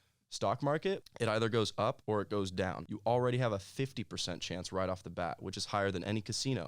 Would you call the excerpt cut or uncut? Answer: cut